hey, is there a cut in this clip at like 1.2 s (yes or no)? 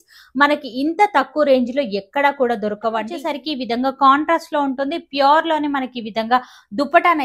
no